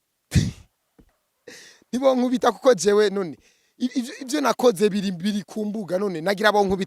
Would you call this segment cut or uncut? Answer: uncut